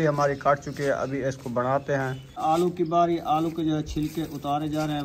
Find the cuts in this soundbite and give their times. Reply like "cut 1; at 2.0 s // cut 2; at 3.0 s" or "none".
cut 1; at 2.4 s